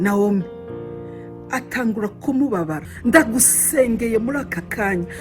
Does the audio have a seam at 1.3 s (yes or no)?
no